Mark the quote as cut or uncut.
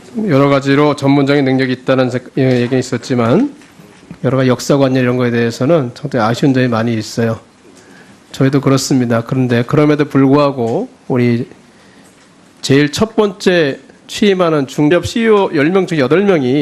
uncut